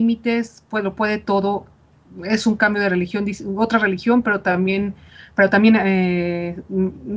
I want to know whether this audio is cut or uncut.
uncut